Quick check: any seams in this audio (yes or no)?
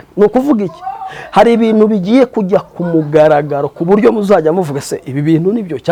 no